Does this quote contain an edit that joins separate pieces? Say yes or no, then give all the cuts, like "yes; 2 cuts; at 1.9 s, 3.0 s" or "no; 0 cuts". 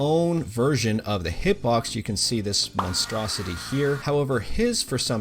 yes; 1 cut; at 4.0 s